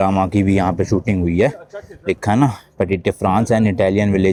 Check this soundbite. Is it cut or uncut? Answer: uncut